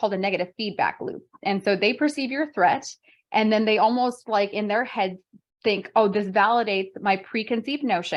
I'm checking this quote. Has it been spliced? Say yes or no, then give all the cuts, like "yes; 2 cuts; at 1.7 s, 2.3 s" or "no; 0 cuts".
no; 0 cuts